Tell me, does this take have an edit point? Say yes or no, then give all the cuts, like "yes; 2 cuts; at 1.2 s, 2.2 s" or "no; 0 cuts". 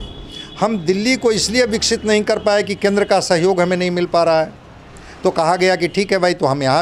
no; 0 cuts